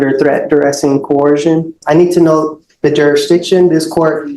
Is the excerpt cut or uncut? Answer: cut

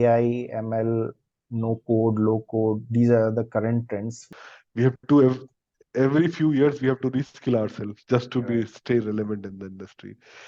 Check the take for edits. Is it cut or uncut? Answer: cut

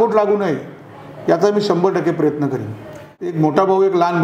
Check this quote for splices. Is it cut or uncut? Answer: cut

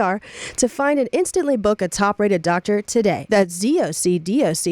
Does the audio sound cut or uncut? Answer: cut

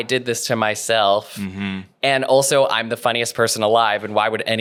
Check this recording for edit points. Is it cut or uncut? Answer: uncut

